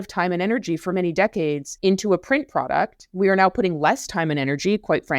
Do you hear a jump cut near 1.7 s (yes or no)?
yes